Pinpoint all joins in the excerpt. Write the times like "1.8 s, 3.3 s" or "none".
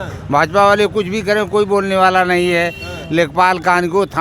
none